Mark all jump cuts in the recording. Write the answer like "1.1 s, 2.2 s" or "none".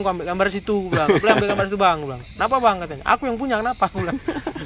none